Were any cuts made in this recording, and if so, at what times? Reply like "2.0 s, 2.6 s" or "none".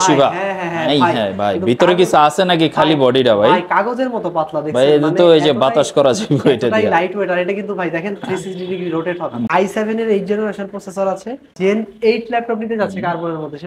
9.5 s, 11.5 s